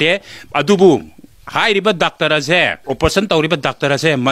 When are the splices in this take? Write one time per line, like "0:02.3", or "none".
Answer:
0:02.8